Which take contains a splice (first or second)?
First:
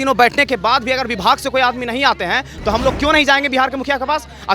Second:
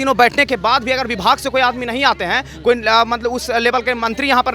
first